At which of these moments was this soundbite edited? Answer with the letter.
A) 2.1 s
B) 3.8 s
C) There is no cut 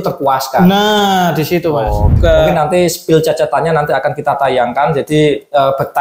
A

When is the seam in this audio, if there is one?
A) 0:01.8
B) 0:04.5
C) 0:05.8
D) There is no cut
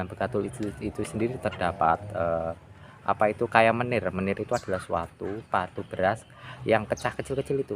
C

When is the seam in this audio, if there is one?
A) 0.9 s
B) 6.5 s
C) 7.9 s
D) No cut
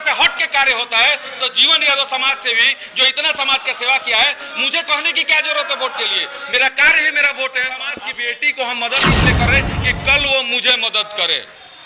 C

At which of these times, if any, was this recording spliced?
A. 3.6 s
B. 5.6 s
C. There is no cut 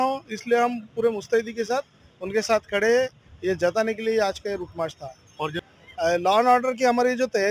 B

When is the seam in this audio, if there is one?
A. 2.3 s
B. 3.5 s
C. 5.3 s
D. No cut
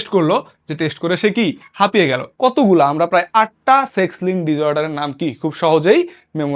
A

